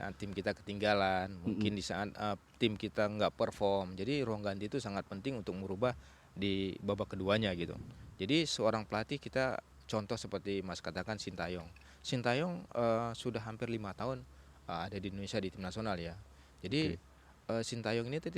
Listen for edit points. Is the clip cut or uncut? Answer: uncut